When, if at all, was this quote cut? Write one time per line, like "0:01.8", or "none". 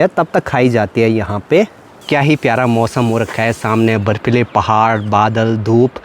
0:02.0